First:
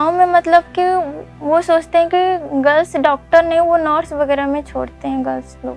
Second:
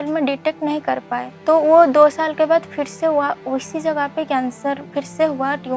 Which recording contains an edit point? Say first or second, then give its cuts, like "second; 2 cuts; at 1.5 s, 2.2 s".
second; 2 cuts; at 1.3 s, 4.8 s